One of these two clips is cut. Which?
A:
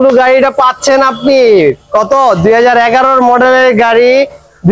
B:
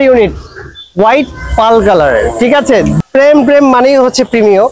B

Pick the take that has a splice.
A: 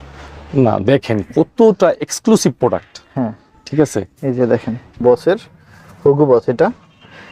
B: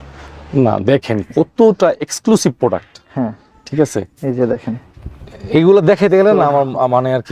A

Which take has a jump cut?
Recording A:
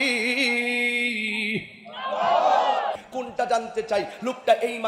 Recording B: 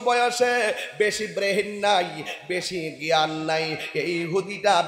A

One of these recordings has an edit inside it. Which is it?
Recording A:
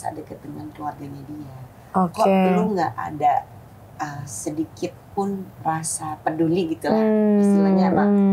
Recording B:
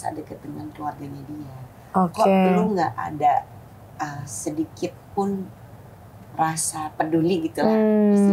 A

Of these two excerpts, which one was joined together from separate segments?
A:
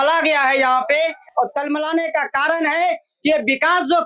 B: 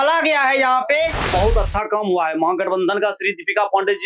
B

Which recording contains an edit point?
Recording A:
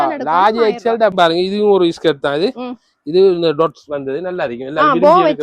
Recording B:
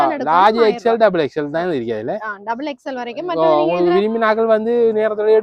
A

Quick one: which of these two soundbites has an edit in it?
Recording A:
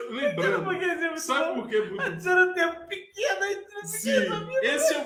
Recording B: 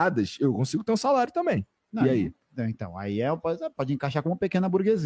B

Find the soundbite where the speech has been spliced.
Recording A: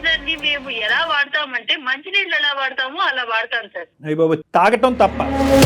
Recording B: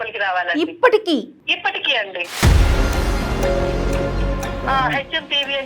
B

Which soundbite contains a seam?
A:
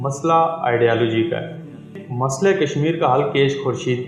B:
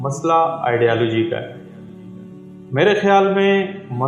A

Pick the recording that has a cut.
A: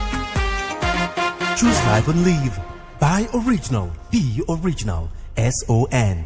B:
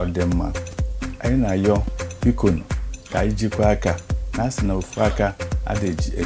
A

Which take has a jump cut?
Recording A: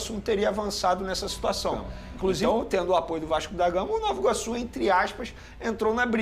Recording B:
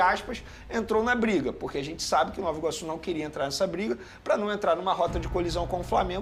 A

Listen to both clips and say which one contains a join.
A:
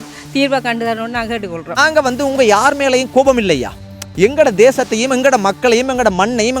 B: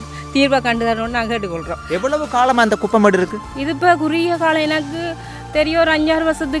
A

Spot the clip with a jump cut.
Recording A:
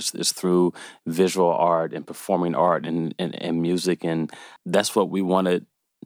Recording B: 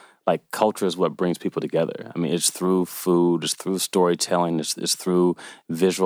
A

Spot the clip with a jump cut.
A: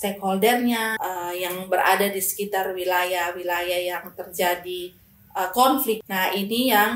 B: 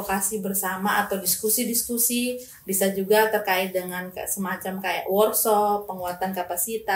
A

